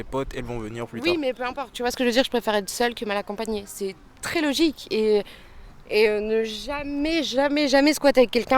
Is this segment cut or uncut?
cut